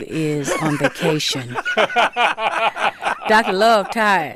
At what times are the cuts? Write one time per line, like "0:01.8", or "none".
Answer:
none